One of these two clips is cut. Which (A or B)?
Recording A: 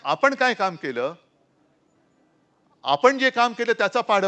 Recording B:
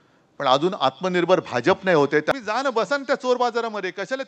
B